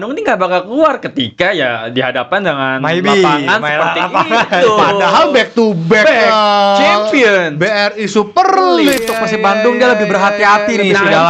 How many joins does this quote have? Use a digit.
1